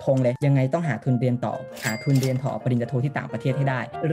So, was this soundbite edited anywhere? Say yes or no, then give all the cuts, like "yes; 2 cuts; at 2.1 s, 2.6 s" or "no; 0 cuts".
no; 0 cuts